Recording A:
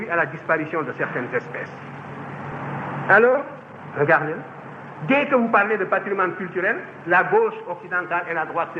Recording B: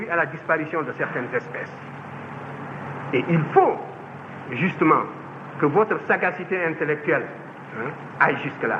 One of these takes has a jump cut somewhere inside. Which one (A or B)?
A